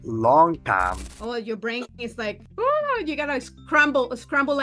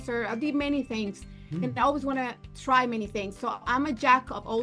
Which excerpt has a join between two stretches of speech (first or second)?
first